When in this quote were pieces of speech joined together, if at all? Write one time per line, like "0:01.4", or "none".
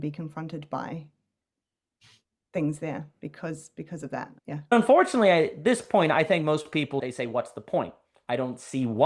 0:04.7
0:07.0